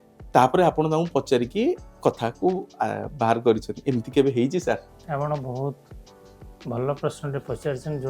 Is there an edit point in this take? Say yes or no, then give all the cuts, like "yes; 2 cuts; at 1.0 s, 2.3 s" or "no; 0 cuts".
yes; 1 cut; at 4.9 s